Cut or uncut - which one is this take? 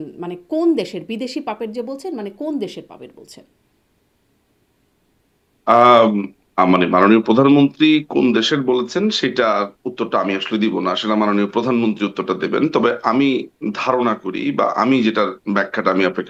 uncut